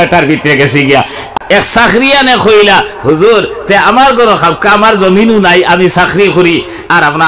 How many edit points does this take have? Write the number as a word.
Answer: one